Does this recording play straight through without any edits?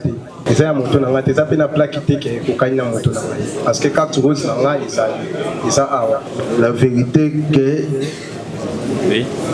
no; 1 cut; at 6.3 s

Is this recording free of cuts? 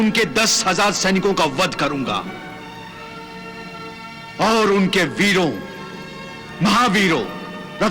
yes; 0 cuts

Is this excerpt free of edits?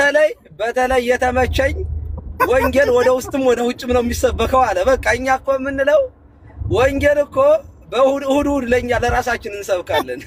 yes; 0 cuts

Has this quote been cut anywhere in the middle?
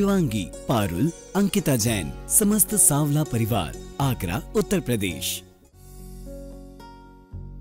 yes; 1 cut; at 5.2 s

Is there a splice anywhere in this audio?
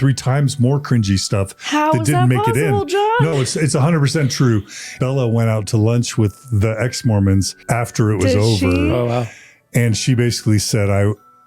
yes; 2 cuts; at 4.9 s, 7.6 s

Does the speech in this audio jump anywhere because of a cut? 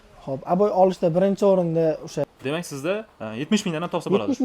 yes; 1 cut; at 2.3 s

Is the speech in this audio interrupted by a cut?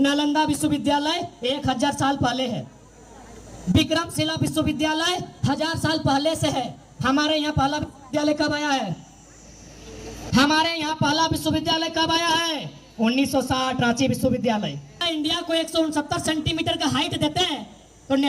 yes; 1 cut; at 15.1 s

